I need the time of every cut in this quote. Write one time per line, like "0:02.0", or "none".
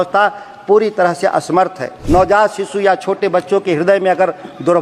0:01.9